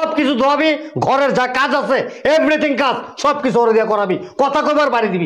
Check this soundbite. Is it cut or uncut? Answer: uncut